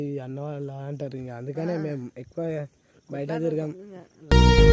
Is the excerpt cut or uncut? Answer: uncut